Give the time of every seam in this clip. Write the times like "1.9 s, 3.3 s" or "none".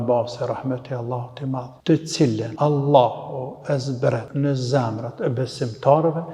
1.7 s, 2.5 s, 4.3 s